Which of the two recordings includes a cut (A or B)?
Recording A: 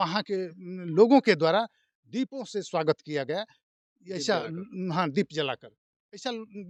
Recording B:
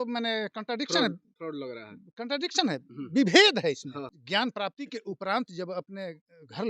B